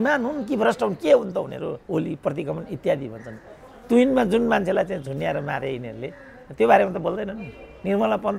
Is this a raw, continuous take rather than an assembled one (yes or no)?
no